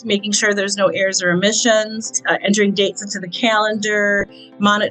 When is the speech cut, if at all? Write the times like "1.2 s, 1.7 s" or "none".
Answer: 2.2 s